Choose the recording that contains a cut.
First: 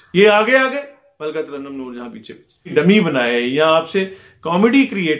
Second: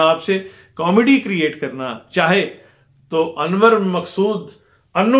first; 1 cut; at 2.6 s

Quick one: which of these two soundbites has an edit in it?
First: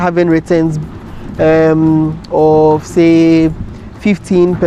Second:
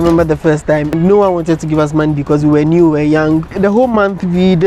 second; 2 cuts; at 0.9 s, 3.5 s

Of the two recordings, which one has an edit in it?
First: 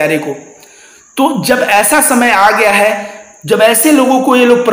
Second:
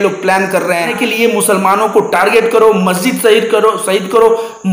second; 1 cut; at 0.9 s

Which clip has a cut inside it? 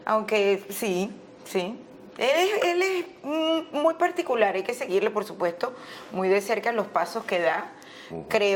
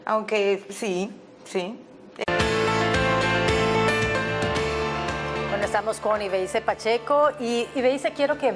first; 1 cut; at 2.2 s

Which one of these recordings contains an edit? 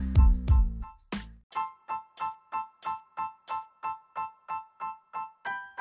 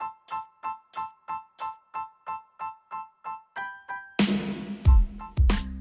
first; 1 cut; at 1.0 s

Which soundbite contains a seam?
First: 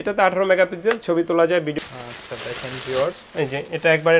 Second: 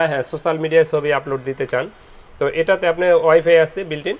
first; 1 cut; at 1.7 s

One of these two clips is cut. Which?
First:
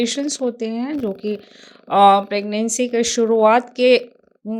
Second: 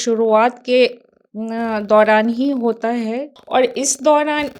second; 1 cut; at 3.3 s

